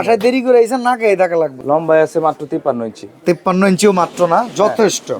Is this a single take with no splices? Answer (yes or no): no